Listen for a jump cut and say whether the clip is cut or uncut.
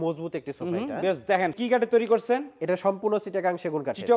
cut